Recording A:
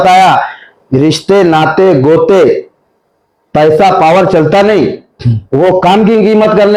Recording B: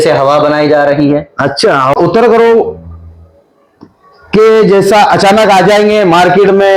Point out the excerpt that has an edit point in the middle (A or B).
B